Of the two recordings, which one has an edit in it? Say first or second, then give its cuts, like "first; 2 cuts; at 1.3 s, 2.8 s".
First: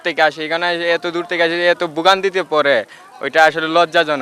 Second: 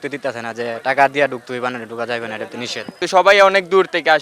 second; 1 cut; at 2.9 s